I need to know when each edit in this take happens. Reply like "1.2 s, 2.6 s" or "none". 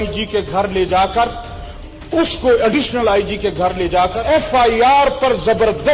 4.2 s